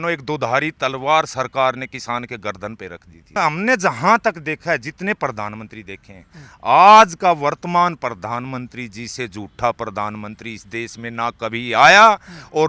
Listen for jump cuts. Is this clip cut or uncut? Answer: cut